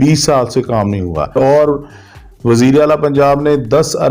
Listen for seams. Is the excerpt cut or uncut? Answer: cut